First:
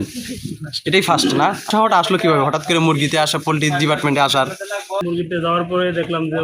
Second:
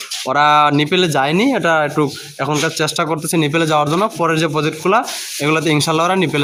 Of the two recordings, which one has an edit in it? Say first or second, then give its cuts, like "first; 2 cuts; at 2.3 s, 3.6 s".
first; 2 cuts; at 1.7 s, 5.0 s